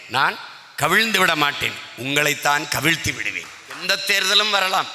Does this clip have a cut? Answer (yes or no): yes